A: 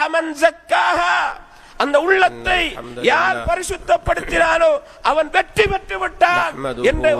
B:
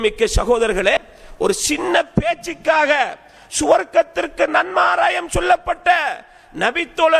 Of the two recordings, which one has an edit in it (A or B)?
B